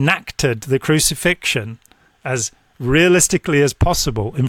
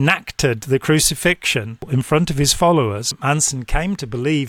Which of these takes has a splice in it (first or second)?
second